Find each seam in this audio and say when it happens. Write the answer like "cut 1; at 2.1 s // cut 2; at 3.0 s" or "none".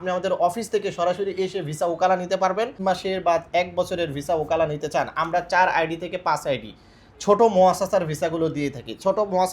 cut 1; at 2.8 s